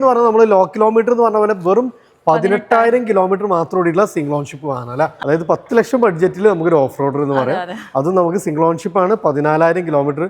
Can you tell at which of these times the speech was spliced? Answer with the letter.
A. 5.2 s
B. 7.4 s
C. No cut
A